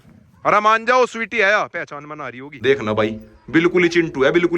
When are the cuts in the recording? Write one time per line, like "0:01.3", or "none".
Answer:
0:02.5